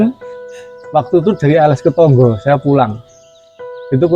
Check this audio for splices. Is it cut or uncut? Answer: uncut